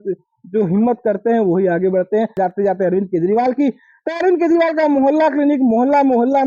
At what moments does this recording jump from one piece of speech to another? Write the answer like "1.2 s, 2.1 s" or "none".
2.4 s